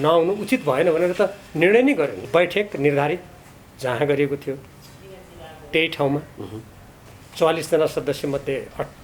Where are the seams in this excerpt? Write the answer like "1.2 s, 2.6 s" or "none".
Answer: 2.2 s